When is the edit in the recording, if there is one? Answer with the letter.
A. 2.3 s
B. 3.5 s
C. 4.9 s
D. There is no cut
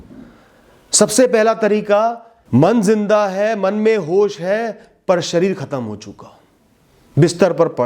A